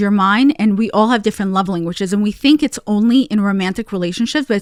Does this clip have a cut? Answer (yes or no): no